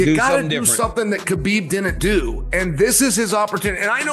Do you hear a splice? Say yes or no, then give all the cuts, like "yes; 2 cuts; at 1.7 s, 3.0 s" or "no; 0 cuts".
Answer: no; 0 cuts